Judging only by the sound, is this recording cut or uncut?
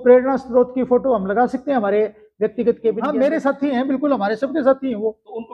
cut